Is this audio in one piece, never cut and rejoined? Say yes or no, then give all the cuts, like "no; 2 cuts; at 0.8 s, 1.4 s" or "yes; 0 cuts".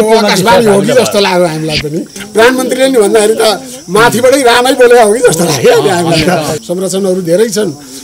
no; 2 cuts; at 2.2 s, 6.6 s